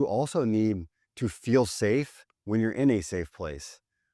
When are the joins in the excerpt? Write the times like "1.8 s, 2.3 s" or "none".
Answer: none